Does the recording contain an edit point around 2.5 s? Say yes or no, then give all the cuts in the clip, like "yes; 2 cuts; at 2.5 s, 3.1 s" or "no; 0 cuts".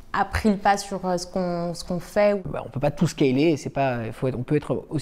yes; 1 cut; at 2.5 s